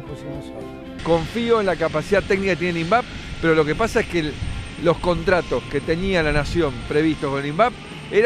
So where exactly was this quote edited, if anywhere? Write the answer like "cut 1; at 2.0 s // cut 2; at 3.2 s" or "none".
cut 1; at 1.0 s